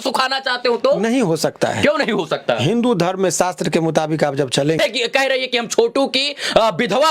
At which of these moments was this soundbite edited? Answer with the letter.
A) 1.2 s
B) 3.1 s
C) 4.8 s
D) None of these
C